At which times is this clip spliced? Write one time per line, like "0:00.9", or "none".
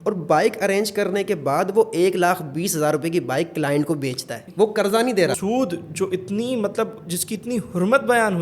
0:04.4
0:05.4